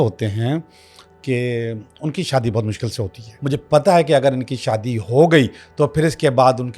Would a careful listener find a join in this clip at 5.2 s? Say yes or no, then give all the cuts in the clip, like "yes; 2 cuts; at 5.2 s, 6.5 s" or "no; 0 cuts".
no; 1 cut; at 3.2 s